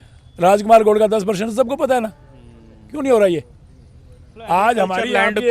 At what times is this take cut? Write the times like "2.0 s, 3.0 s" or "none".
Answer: none